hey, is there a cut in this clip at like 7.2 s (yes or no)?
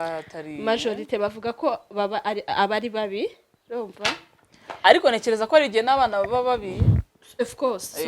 no